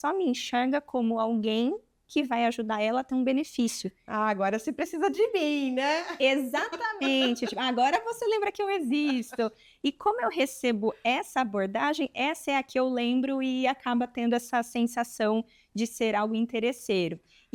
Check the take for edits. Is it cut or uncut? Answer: uncut